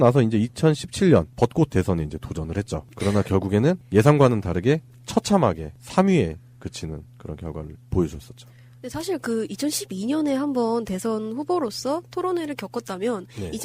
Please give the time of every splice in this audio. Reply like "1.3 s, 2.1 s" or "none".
8.3 s